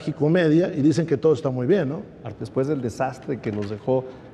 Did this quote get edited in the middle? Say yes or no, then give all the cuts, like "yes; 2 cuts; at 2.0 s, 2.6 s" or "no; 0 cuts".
yes; 1 cut; at 2.3 s